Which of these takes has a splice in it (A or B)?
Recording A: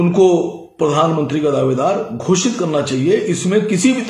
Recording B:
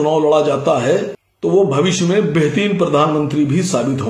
B